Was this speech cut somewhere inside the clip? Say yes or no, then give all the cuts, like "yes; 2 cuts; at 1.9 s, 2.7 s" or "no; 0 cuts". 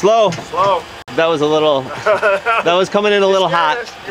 yes; 1 cut; at 1.0 s